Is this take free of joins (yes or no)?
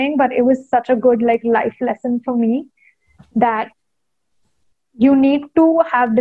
yes